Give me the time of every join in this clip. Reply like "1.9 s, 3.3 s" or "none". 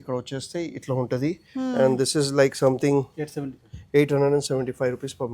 none